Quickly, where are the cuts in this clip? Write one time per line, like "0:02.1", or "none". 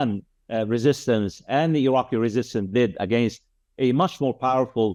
none